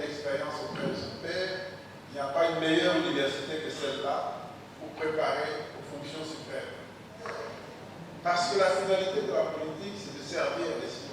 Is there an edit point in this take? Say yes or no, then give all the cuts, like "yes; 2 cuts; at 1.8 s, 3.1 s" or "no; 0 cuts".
yes; 1 cut; at 7.4 s